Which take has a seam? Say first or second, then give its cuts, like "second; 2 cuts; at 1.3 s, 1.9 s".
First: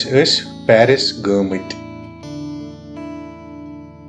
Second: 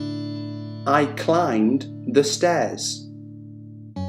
second; 2 cuts; at 0.8 s, 2.8 s